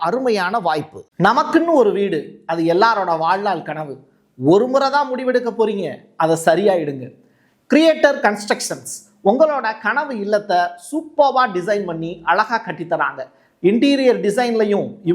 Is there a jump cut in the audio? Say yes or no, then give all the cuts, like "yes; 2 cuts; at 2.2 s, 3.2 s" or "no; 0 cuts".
yes; 1 cut; at 1.0 s